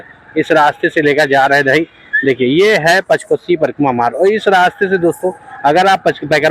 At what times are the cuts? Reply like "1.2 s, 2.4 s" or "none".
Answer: none